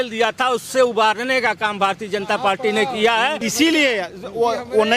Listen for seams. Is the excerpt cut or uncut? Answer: cut